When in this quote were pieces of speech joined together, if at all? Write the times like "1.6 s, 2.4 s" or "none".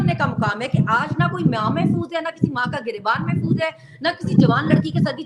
none